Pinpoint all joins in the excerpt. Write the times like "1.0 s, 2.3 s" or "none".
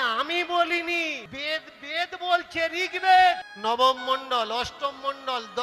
1.3 s, 3.5 s